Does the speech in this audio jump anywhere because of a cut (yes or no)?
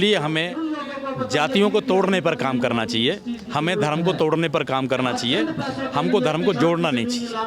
no